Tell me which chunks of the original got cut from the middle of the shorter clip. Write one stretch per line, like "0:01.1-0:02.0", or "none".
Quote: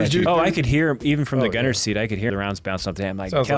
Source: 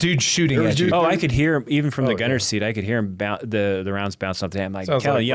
0:03.0-0:03.9